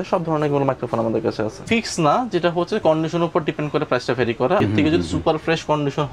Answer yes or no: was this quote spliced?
yes